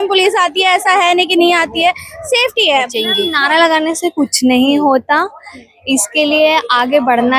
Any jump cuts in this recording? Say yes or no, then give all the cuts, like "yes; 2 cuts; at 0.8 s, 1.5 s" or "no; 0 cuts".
yes; 1 cut; at 3.0 s